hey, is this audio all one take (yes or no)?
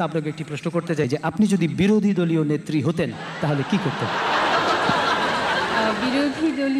yes